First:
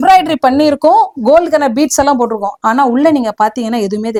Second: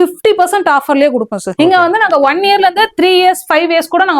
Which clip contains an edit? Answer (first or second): second